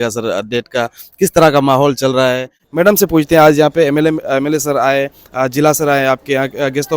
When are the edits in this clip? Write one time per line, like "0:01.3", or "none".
0:02.6